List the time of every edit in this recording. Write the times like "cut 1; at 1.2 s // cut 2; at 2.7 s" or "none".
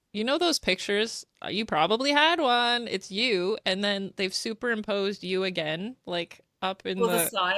none

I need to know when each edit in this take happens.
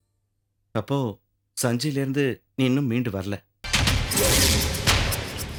none

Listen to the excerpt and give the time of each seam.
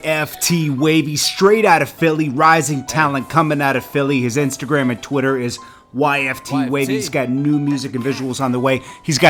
none

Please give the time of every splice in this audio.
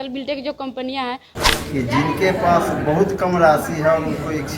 cut 1; at 1.3 s

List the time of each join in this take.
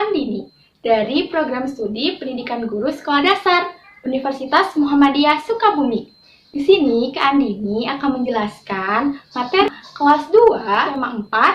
none

